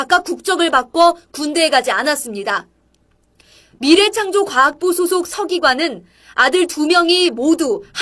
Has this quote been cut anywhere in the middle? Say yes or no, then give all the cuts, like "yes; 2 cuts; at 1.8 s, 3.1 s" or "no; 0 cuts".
yes; 1 cut; at 7.1 s